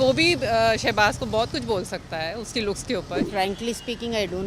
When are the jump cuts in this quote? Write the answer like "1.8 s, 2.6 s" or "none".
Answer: 3.3 s